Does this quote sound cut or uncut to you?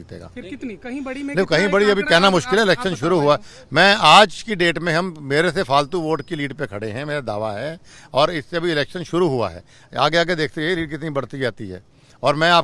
uncut